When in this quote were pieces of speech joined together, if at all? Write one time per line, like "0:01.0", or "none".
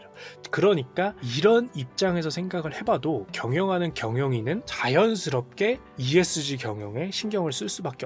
0:01.2
0:04.7
0:05.9